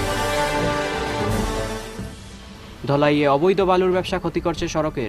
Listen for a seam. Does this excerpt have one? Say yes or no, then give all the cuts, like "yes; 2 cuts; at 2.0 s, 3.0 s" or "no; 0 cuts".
yes; 1 cut; at 1.9 s